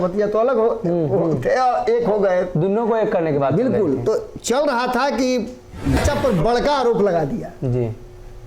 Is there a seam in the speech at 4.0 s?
no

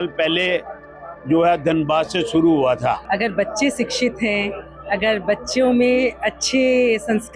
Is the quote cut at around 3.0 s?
yes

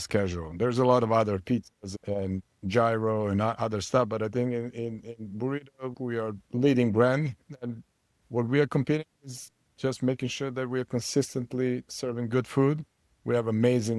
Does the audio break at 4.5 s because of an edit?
no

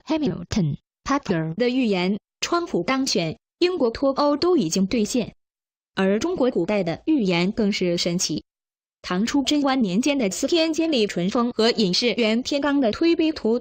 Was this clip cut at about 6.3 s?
yes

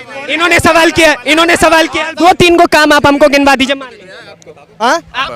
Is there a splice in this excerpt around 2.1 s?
yes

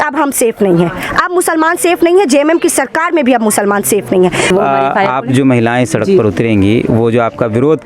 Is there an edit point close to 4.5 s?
yes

